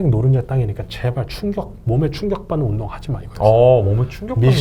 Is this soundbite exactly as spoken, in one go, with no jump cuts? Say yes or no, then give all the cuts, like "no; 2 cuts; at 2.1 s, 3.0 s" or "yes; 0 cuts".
yes; 0 cuts